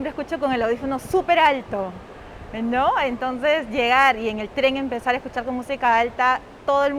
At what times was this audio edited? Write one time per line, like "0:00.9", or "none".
none